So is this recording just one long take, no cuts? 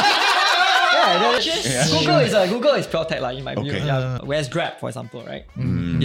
no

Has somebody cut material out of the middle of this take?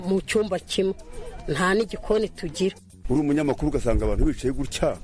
yes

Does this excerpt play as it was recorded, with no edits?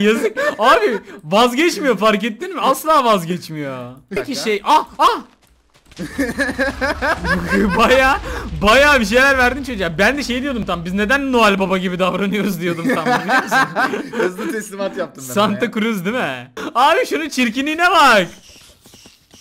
no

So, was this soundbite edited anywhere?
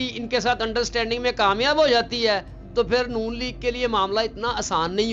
no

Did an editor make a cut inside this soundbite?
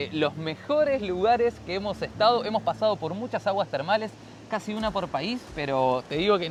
no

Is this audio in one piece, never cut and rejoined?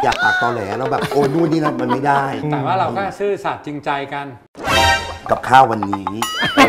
no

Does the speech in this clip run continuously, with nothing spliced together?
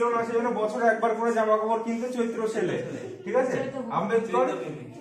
yes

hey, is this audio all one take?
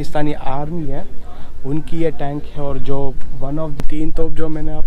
no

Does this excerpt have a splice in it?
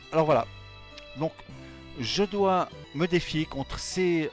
yes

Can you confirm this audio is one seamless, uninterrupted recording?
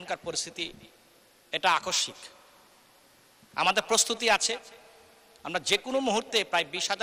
yes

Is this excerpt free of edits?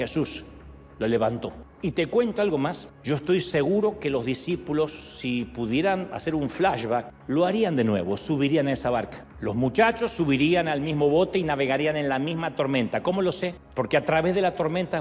no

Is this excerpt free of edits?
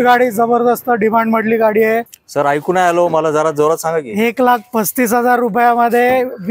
no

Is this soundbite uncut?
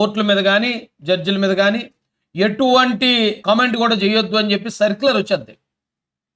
no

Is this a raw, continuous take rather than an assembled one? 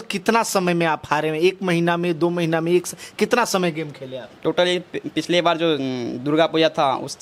yes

